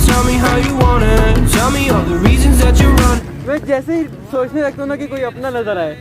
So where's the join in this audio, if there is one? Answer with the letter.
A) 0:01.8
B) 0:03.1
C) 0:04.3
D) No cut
B